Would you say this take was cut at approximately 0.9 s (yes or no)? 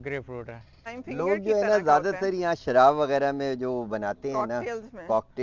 yes